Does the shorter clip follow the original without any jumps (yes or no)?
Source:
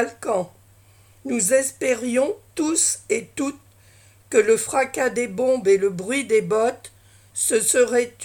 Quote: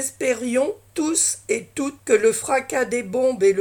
no